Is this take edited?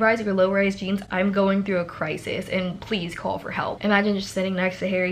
yes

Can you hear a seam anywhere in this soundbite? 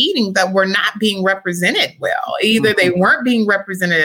no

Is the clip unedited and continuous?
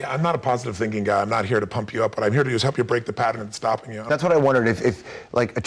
no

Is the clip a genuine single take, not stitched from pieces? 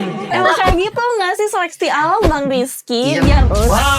yes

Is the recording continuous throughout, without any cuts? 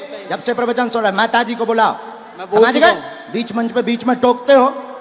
yes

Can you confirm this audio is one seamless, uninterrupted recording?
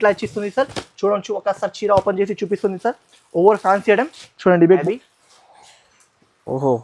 no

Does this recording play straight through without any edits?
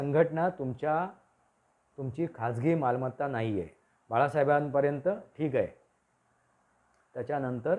yes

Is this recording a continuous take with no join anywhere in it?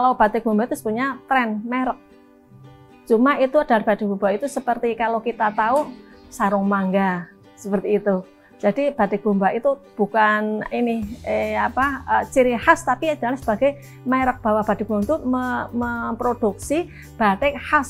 yes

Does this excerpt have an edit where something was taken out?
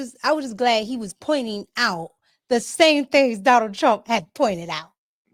no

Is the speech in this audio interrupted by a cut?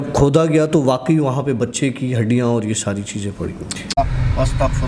yes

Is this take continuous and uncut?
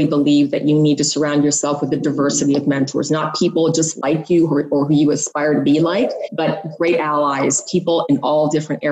yes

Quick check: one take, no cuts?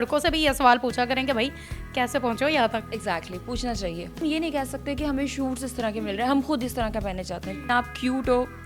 no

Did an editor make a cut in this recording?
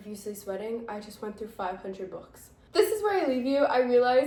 no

